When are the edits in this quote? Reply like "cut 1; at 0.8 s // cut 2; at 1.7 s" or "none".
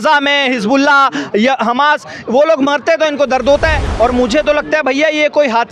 cut 1; at 3.8 s

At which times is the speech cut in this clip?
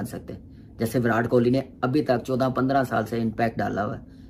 none

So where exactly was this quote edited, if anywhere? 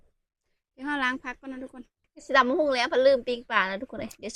cut 1; at 2.2 s

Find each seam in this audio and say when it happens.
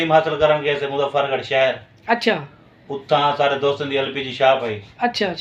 none

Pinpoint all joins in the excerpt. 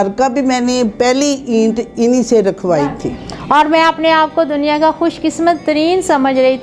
cut 1; at 3.1 s

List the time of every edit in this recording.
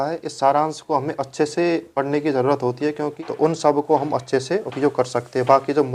cut 1; at 3.1 s

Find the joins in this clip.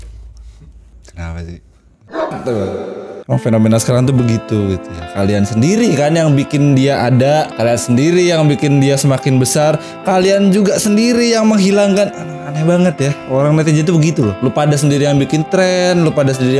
none

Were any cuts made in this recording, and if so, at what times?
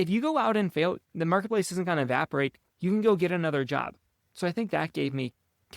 cut 1; at 1.1 s

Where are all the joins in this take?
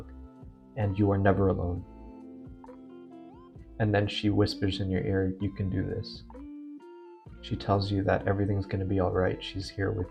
none

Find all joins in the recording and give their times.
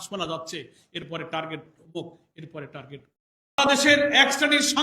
cut 1; at 3.6 s

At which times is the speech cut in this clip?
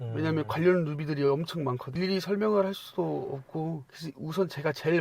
none

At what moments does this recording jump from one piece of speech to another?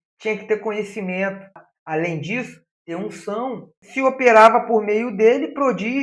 cut 1; at 1.7 s // cut 2; at 3.8 s

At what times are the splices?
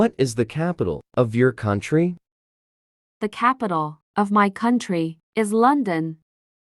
cut 1; at 1.0 s

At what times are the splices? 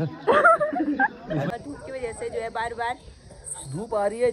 cut 1; at 1.5 s

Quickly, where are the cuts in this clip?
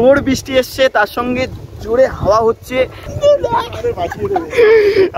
cut 1; at 3.1 s

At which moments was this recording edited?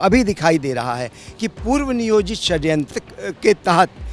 cut 1; at 2.9 s

